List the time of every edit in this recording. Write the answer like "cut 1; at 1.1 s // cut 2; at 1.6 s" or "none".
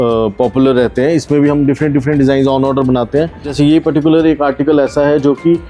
cut 1; at 3.5 s